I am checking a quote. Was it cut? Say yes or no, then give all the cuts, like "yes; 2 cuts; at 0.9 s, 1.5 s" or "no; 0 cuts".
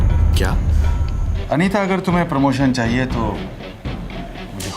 yes; 1 cut; at 1.3 s